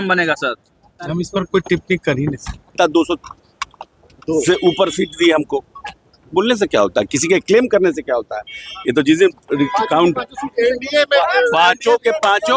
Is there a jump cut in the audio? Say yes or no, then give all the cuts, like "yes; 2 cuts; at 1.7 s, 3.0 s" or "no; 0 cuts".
yes; 1 cut; at 2.8 s